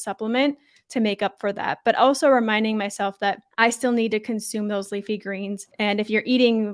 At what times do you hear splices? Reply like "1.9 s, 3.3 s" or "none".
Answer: 3.5 s, 5.7 s